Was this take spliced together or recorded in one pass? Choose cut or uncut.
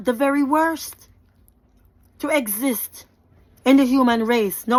uncut